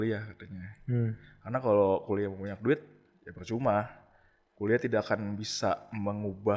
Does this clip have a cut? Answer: no; 0 cuts

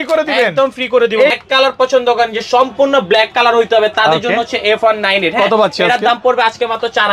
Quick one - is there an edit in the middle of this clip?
yes; 1 cut; at 1.3 s

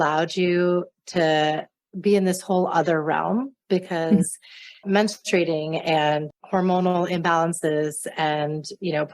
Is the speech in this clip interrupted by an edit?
yes; 1 cut; at 6.3 s

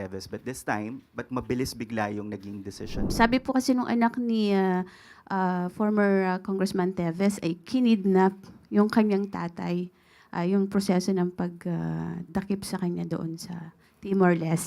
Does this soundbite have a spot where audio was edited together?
yes; 1 cut; at 3.1 s

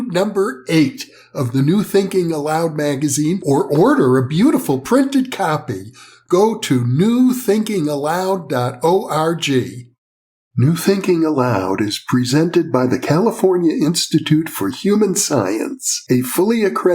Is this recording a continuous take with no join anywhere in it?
no; 1 cut; at 10.5 s

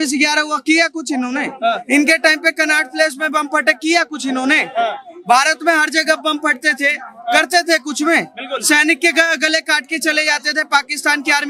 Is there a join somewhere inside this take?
no; 0 cuts

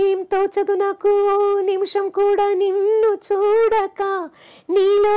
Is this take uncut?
yes; 0 cuts

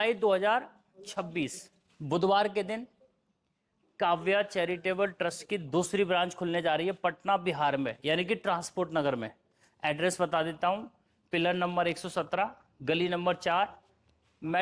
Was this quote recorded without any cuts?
yes; 0 cuts

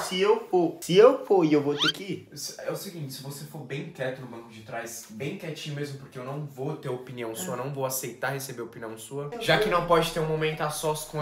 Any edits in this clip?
no; 0 cuts

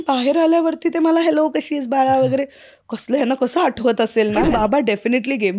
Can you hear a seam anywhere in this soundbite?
yes; 1 cut; at 4.4 s

